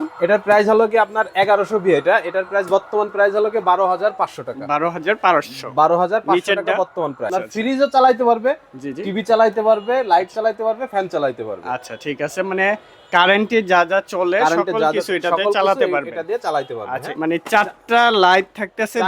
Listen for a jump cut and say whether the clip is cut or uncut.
cut